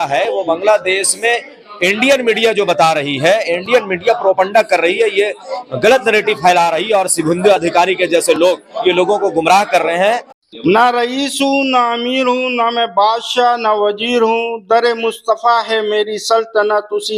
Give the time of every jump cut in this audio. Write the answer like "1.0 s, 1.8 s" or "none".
10.3 s

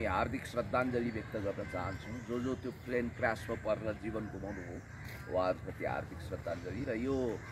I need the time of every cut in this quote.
none

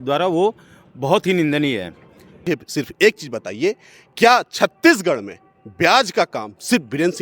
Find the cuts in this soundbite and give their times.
2.4 s

